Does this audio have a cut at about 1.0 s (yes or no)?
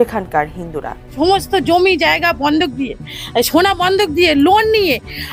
yes